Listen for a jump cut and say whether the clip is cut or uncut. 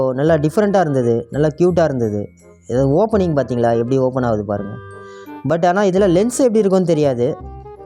uncut